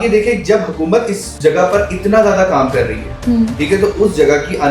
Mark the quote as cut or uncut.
cut